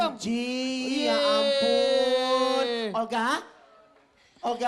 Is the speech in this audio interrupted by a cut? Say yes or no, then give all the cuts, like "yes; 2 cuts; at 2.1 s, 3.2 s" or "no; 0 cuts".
no; 0 cuts